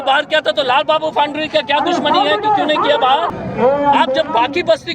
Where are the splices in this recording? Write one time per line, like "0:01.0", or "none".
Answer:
0:03.4